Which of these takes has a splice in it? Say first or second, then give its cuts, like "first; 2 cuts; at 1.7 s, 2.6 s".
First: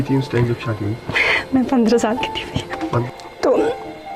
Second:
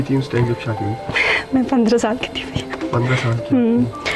first; 1 cut; at 3.1 s